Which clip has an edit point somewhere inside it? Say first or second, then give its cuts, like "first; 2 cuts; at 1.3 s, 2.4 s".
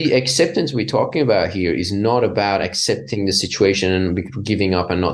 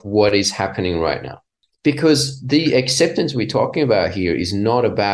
second; 1 cut; at 1.6 s